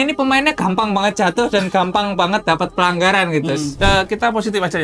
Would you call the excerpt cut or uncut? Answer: cut